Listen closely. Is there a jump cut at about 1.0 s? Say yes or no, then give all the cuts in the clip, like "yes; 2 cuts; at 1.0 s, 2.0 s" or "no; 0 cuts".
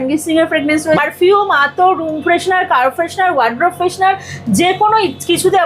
yes; 1 cut; at 1.0 s